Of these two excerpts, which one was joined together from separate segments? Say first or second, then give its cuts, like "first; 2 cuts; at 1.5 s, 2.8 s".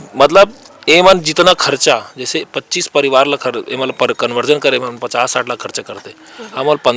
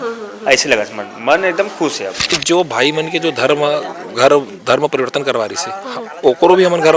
second; 1 cut; at 2.3 s